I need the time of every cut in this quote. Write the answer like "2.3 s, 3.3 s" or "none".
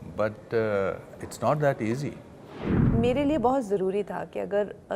2.8 s